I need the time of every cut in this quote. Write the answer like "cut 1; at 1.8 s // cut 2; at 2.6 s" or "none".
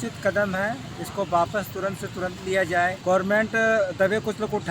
cut 1; at 3.0 s